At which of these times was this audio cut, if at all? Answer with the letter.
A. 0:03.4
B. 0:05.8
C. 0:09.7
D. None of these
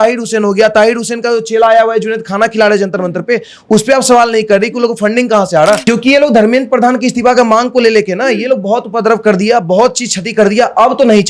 B